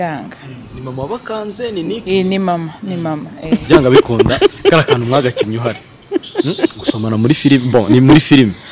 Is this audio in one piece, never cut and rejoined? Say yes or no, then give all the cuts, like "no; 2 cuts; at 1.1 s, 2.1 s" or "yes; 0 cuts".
yes; 0 cuts